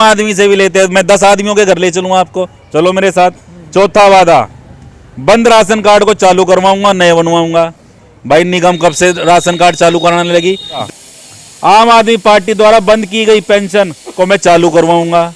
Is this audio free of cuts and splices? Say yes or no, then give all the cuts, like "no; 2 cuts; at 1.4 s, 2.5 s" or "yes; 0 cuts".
no; 1 cut; at 10.8 s